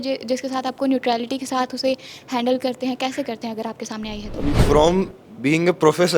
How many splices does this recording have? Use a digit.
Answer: 1